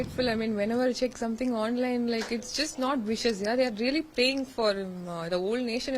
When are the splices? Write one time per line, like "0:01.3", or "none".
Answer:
none